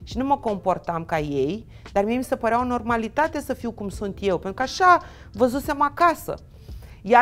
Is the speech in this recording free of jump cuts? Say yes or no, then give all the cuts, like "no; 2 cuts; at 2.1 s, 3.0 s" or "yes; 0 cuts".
yes; 0 cuts